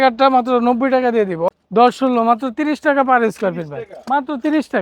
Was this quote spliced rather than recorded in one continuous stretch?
yes; 1 cut; at 1.5 s

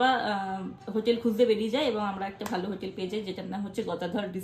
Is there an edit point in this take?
no; 0 cuts

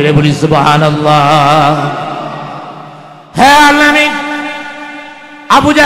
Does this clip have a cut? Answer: yes; 1 cut; at 2.9 s

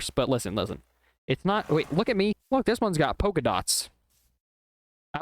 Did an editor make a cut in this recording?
yes; 1 cut; at 2.4 s

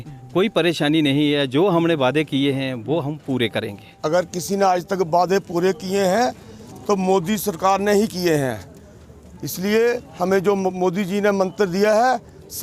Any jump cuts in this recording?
yes; 1 cut; at 3.8 s

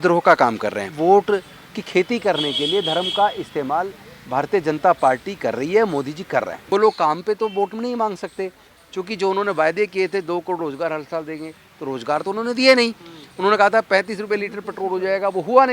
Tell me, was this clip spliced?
yes; 2 cuts; at 0.9 s, 6.6 s

